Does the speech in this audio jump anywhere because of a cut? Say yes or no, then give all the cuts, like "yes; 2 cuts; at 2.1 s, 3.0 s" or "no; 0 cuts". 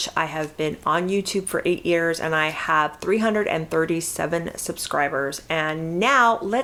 no; 0 cuts